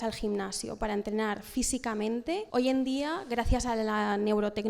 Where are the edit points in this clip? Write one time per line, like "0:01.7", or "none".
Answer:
0:02.5